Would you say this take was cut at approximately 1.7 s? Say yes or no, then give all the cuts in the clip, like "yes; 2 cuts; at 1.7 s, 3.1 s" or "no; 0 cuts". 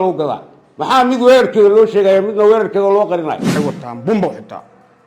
no; 1 cut; at 3.5 s